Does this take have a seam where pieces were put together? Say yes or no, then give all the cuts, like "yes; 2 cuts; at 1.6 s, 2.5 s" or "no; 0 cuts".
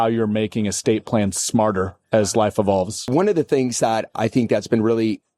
yes; 1 cut; at 3.1 s